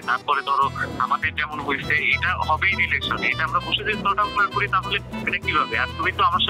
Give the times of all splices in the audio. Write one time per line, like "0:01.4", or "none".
none